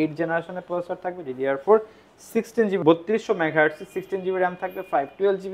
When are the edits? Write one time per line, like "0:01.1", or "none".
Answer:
0:02.8